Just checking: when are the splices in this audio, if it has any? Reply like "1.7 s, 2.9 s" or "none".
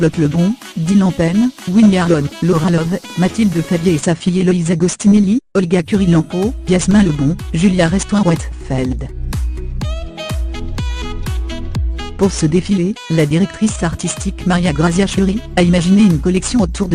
none